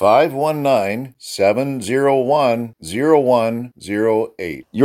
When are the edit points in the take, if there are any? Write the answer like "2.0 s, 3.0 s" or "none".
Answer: none